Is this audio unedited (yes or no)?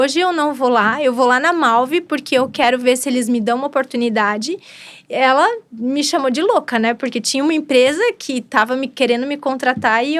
yes